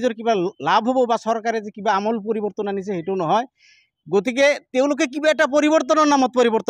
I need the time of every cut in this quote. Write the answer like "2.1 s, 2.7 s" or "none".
none